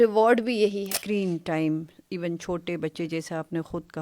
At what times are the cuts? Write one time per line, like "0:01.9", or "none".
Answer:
0:00.9

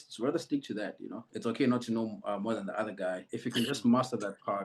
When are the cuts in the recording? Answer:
0:01.3
0:03.3

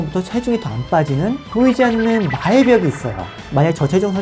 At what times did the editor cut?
0:03.3

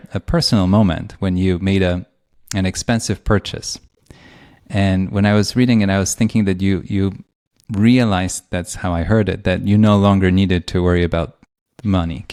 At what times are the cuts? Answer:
none

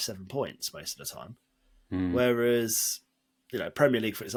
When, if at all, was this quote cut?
none

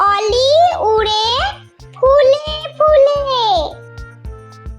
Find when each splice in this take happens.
0:03.8

